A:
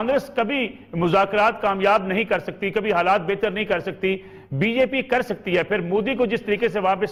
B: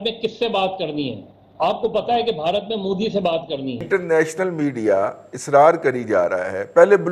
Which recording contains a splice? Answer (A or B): B